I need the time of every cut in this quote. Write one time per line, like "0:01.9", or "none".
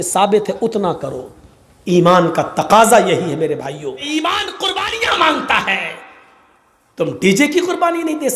0:04.0